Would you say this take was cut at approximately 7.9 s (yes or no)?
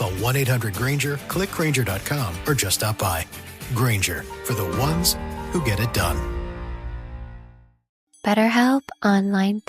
yes